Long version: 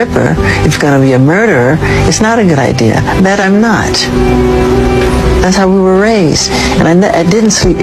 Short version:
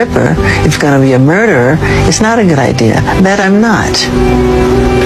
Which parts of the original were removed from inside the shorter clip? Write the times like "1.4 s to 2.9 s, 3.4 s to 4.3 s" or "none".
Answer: none